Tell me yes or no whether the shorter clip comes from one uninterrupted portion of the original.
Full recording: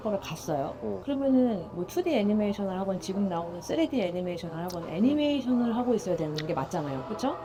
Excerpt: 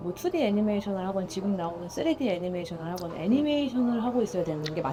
yes